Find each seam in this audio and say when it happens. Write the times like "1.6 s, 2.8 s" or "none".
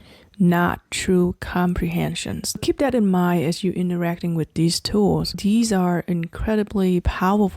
2.6 s, 5.4 s